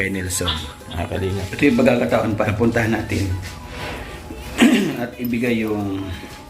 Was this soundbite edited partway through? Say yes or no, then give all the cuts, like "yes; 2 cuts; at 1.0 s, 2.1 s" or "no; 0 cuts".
yes; 1 cut; at 1.5 s